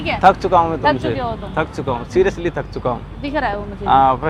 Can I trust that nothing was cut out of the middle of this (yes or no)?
yes